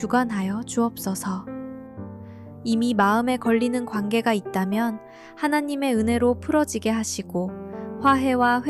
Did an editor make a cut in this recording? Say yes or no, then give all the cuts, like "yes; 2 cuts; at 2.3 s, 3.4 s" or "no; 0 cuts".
yes; 2 cuts; at 1.4 s, 2.6 s